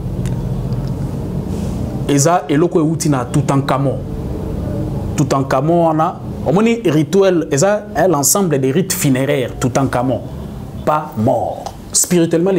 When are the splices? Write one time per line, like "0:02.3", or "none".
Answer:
0:10.8